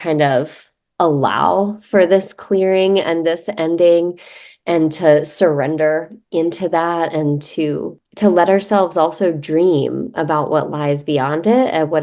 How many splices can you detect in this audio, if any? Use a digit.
1